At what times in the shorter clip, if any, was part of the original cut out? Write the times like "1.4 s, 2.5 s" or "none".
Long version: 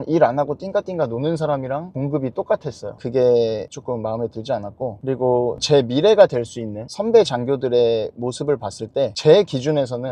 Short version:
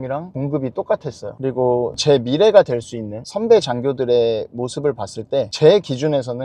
1.3 s